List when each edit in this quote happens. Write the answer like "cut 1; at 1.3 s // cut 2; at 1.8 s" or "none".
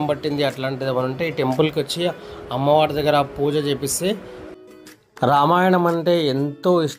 cut 1; at 4.5 s